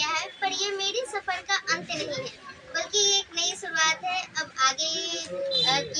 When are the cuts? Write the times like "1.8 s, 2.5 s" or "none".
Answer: none